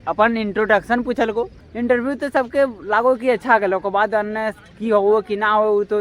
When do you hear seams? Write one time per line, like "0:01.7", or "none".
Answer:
0:01.6